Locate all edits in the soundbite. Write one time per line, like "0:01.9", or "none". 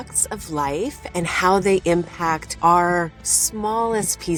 none